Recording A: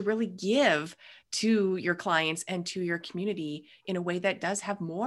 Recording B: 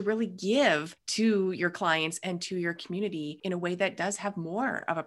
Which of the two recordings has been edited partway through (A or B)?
B